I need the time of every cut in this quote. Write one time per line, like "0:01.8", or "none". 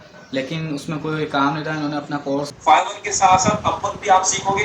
0:02.5